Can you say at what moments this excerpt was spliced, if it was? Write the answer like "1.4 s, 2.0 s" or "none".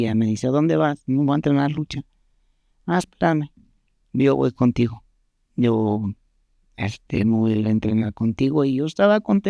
none